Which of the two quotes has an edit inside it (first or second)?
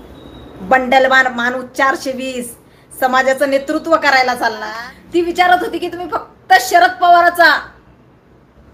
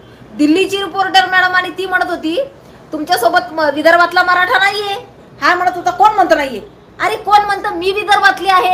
first